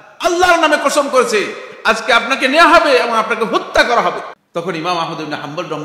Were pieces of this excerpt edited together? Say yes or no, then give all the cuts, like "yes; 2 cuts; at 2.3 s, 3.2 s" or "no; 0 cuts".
yes; 1 cut; at 4.4 s